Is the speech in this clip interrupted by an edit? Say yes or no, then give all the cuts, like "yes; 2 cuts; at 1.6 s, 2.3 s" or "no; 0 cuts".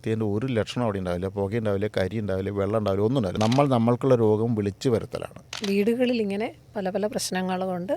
yes; 2 cuts; at 3.3 s, 5.5 s